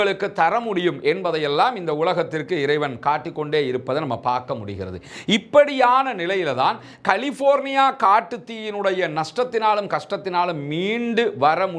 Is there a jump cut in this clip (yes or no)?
no